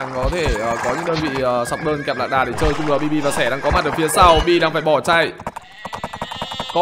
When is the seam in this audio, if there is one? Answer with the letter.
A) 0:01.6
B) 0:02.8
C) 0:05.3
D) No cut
D